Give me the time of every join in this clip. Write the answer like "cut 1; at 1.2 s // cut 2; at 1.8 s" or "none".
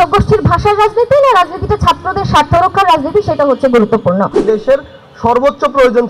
cut 1; at 4.4 s